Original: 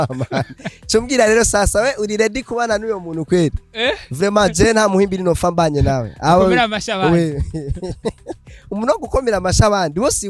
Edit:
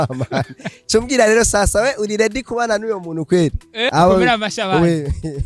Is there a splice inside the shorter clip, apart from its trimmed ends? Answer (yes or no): yes